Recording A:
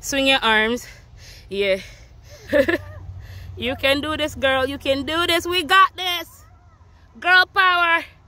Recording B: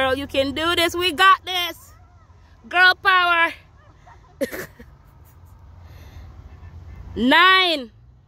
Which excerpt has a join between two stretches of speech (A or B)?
A